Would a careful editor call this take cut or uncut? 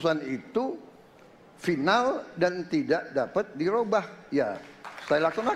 uncut